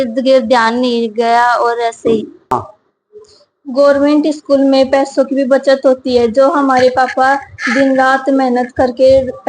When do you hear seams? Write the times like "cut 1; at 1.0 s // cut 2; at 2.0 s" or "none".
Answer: cut 1; at 2.6 s